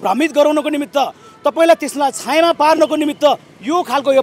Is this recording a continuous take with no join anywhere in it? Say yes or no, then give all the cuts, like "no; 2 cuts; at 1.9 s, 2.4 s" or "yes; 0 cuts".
yes; 0 cuts